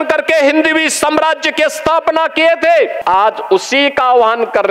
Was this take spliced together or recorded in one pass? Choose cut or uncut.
cut